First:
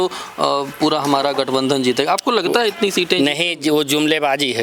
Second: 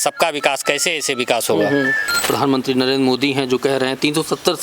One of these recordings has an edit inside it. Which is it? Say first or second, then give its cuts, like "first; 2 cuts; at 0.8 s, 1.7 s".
second; 1 cut; at 2.2 s